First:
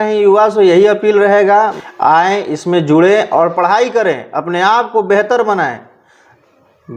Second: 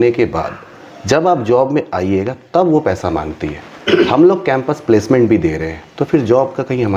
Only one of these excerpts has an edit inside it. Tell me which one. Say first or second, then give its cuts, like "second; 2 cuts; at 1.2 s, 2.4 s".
first; 1 cut; at 1.8 s